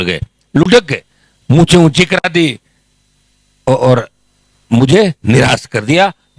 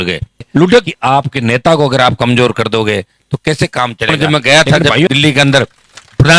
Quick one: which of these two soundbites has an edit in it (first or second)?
second